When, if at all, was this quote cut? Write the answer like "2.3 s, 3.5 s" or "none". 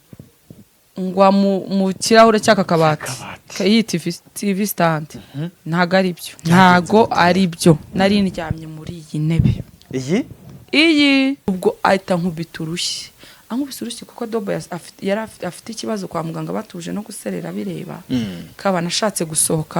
6.3 s, 11.5 s